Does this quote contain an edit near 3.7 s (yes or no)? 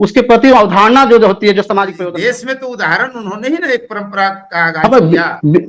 no